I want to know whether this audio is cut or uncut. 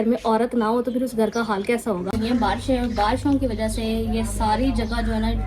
cut